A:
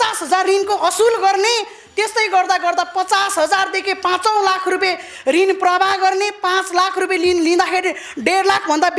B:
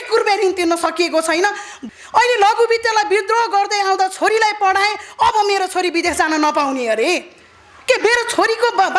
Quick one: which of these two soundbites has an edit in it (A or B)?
B